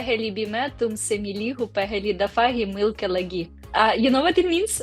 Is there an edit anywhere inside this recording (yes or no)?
no